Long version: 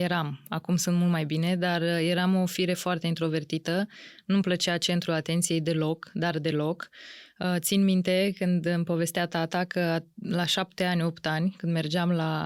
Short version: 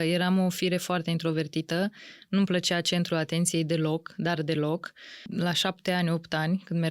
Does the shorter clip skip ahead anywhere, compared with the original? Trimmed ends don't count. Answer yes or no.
yes